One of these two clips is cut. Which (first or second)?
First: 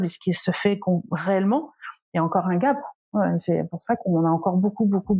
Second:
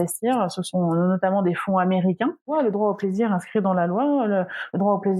second